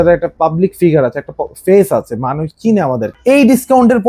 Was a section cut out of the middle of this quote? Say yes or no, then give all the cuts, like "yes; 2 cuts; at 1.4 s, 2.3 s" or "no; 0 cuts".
yes; 1 cut; at 3.1 s